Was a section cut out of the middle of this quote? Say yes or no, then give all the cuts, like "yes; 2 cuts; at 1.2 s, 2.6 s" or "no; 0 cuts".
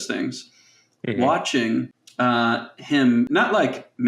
yes; 2 cuts; at 2.0 s, 3.3 s